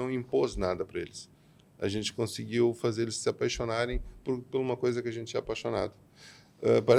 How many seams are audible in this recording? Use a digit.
0